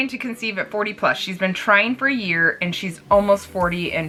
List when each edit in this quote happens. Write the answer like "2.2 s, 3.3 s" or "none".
none